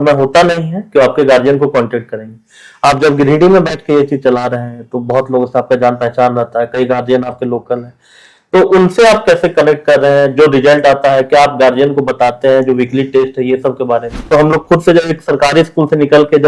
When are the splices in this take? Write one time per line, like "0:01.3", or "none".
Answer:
0:14.3

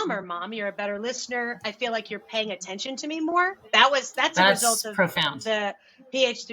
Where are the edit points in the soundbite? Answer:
none

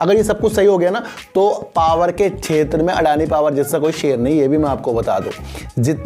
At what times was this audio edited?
none

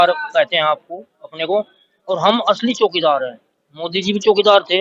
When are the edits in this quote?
none

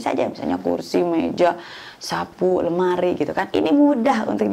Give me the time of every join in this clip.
0:03.4

